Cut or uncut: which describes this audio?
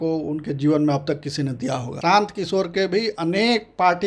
cut